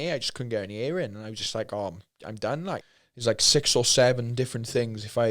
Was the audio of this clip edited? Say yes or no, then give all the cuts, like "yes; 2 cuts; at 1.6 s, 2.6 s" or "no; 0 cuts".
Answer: yes; 1 cut; at 2.8 s